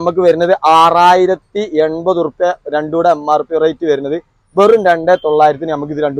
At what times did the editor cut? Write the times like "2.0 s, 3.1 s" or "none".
none